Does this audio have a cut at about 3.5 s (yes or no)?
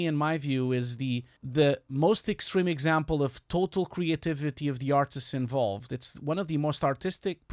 no